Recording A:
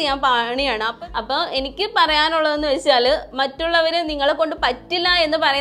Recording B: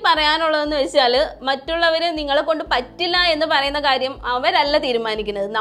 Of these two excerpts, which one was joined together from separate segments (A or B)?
A